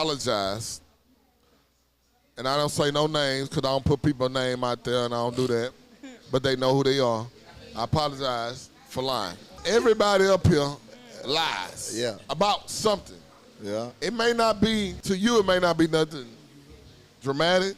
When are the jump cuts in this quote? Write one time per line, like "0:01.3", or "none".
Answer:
0:09.5
0:14.9